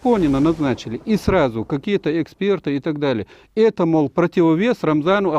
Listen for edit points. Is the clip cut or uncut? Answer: uncut